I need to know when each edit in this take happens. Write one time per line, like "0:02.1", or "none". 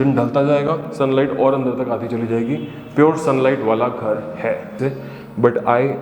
0:04.7